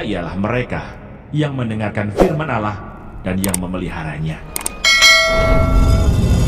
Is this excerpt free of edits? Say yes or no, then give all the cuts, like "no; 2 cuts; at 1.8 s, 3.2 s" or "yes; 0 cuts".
yes; 0 cuts